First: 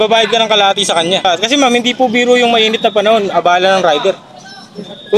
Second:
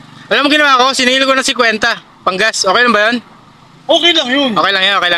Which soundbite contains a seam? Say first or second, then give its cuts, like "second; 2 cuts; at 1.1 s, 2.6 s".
first; 1 cut; at 1.2 s